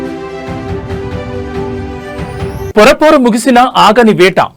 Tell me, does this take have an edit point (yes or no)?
yes